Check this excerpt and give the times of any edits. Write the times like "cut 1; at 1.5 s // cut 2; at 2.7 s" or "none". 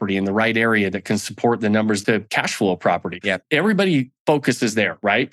cut 1; at 2.0 s // cut 2; at 3.3 s